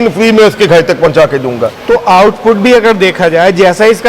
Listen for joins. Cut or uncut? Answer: cut